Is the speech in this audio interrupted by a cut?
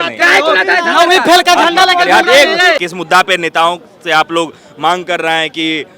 yes; 1 cut; at 2.9 s

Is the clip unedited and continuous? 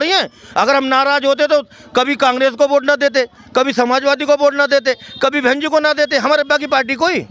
yes; 0 cuts

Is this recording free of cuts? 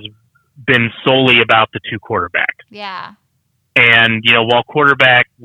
yes; 0 cuts

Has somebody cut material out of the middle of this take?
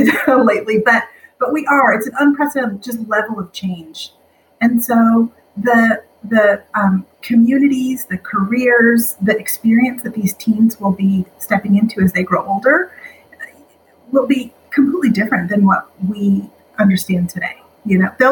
no; 0 cuts

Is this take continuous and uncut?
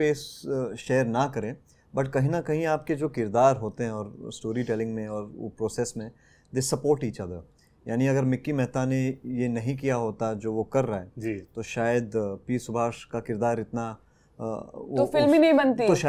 yes; 0 cuts

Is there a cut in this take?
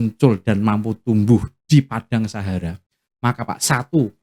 no; 0 cuts

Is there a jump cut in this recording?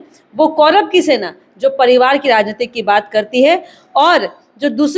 no; 0 cuts

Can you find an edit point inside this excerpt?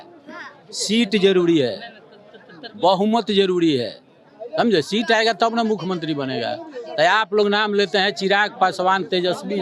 no; 0 cuts

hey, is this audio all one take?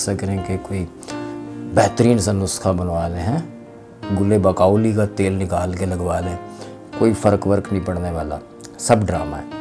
yes; 0 cuts

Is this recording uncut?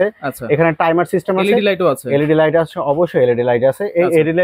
yes; 0 cuts

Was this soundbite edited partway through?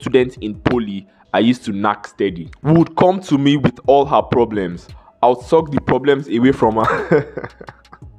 no; 0 cuts

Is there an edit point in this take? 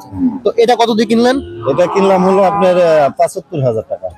no; 0 cuts

